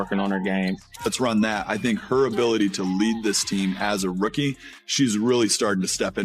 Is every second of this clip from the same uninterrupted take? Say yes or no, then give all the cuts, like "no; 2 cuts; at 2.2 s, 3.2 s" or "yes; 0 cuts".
no; 1 cut; at 1.0 s